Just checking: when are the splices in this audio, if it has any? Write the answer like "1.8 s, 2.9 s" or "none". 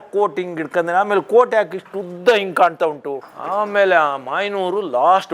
3.3 s

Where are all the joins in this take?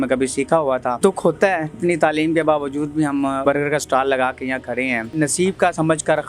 1.0 s, 1.8 s, 3.4 s, 5.1 s

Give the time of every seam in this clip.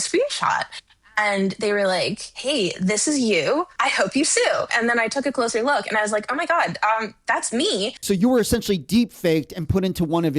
3.7 s, 4.7 s, 8.0 s

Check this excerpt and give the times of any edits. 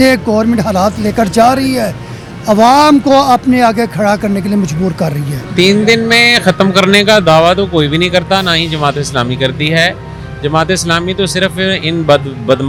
none

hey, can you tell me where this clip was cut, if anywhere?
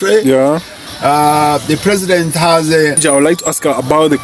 3.0 s

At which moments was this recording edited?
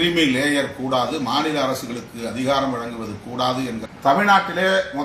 3.9 s

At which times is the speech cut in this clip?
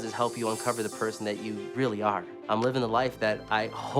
1.2 s, 2.3 s

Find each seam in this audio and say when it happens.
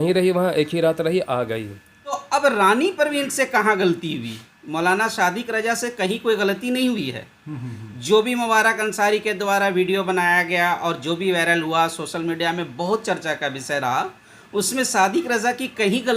2.2 s

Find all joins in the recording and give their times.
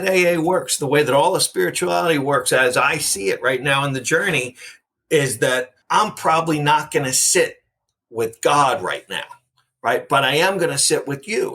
5.8 s

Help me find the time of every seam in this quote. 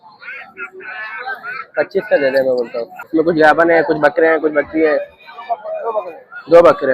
3.1 s

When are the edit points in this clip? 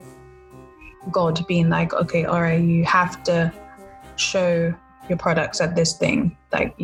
none

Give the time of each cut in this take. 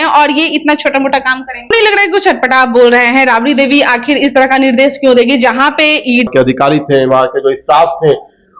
1.7 s, 6.3 s

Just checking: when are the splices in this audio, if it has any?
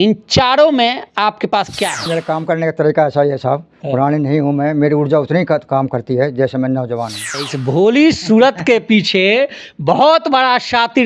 2.1 s, 7.3 s

